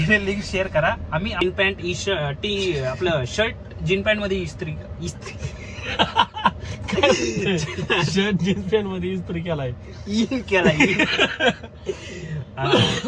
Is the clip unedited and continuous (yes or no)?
no